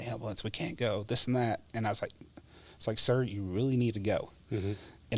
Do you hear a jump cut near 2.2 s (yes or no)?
no